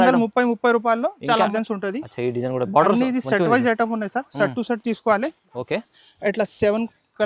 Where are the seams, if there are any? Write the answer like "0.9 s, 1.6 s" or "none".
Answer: 1.5 s

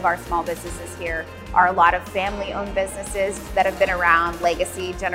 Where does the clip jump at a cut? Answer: none

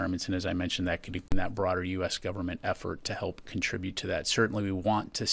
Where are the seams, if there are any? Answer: none

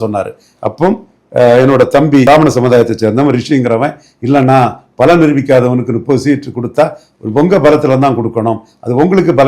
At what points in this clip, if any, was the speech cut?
2.2 s

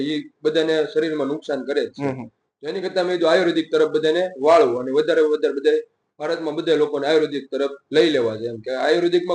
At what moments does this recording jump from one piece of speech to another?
none

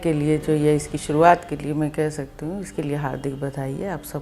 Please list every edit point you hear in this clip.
none

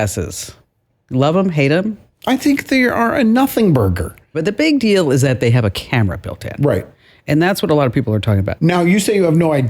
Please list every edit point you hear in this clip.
4.4 s, 8.5 s

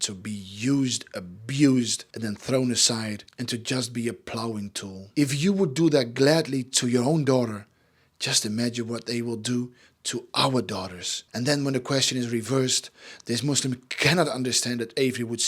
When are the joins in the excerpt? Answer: 2.1 s, 5.0 s, 11.2 s

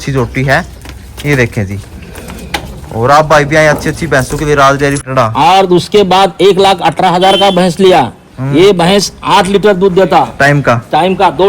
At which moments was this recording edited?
5.0 s

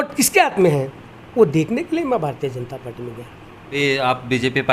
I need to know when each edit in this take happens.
3.7 s

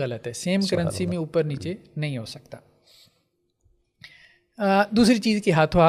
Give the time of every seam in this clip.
none

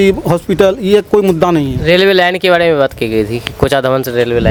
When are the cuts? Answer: none

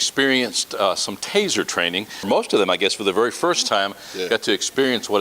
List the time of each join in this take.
2.3 s

